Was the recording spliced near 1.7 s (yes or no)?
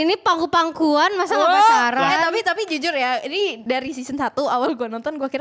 no